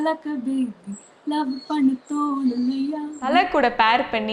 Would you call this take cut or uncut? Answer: cut